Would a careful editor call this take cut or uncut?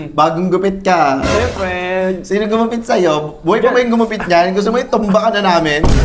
uncut